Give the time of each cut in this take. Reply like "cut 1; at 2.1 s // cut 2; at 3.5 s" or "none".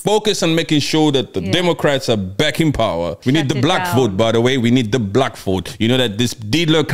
cut 1; at 3.1 s // cut 2; at 5.7 s